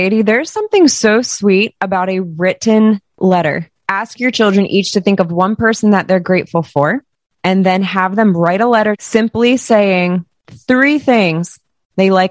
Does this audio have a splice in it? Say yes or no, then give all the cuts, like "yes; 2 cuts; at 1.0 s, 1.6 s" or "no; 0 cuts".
yes; 2 cuts; at 3.8 s, 9.0 s